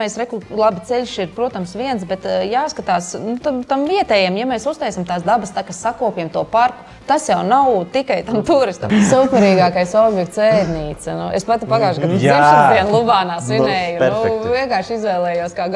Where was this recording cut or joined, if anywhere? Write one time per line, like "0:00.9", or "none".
0:08.8